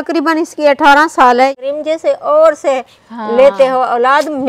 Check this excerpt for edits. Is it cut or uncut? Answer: cut